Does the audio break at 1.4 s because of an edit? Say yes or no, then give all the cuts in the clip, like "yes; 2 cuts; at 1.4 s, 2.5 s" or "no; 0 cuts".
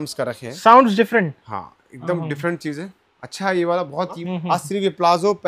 no; 1 cut; at 4.2 s